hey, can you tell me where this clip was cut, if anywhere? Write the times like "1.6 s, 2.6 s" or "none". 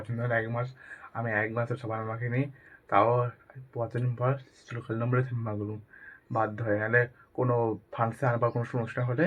none